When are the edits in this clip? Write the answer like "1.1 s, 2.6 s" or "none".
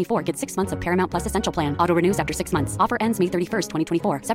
none